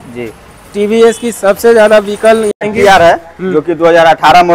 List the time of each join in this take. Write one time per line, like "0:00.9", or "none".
0:02.6